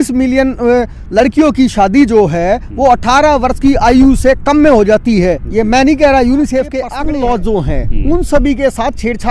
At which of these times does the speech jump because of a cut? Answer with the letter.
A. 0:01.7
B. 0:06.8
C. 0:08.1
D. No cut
B